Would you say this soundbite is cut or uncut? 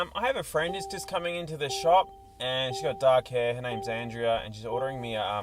uncut